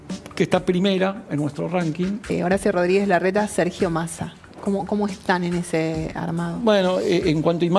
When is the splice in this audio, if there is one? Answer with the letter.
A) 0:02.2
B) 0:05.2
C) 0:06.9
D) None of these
A